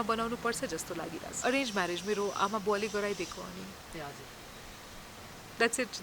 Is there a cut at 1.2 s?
yes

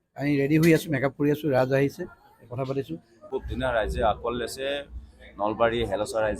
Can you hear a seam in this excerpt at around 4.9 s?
no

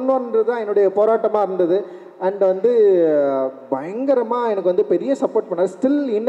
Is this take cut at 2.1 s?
no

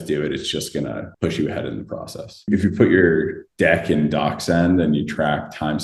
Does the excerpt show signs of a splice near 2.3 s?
yes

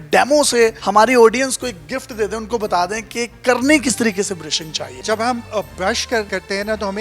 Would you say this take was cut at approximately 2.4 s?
no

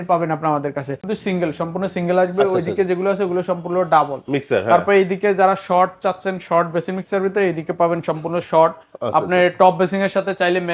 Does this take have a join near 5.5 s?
no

